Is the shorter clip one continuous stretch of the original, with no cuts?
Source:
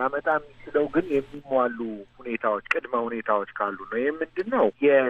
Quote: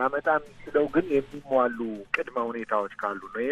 no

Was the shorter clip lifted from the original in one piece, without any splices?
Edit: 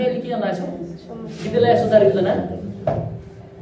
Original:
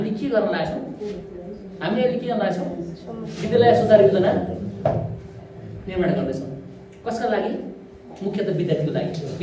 yes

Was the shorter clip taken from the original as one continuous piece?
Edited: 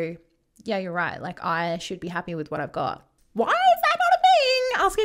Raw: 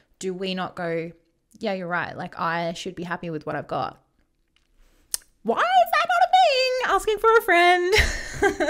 no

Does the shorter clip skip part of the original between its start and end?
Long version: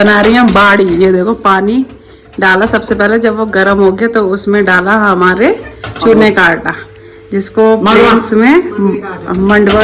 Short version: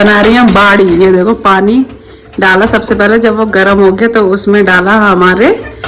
no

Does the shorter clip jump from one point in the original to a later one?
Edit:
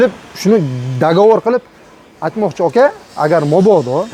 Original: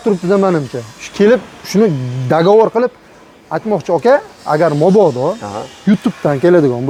no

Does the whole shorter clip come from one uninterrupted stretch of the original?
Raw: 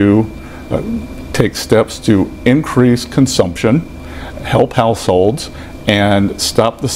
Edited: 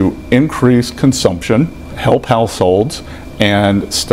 no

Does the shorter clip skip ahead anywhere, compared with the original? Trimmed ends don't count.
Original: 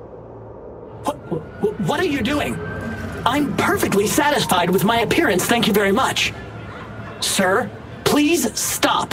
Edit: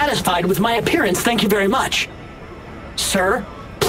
no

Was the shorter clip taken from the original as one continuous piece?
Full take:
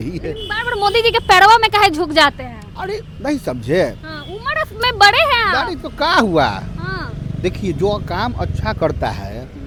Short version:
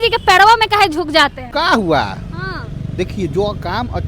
no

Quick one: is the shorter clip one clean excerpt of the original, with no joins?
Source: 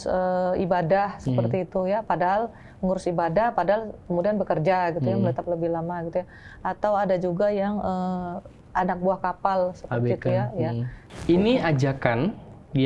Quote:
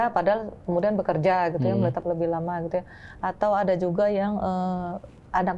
yes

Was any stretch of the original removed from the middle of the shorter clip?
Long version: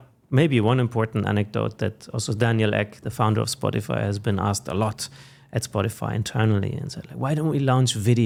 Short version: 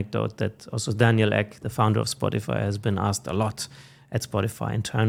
no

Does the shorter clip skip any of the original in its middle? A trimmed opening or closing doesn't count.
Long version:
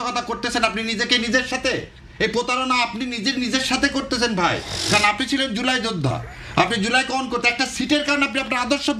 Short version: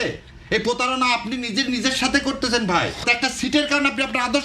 yes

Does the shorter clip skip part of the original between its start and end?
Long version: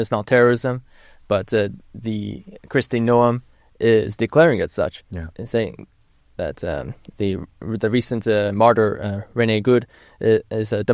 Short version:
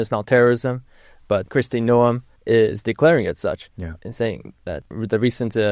yes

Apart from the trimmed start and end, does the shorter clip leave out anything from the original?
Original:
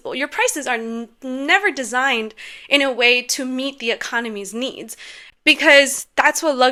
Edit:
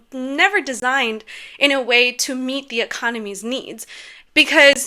no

